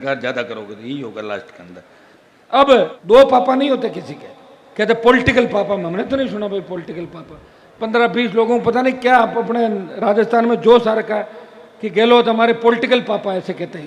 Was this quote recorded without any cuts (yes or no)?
no